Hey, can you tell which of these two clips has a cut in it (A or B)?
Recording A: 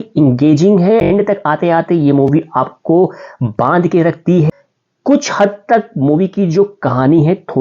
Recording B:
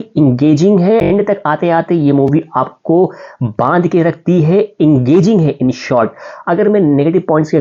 A